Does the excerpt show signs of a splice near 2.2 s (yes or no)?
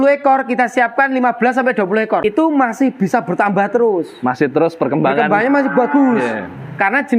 yes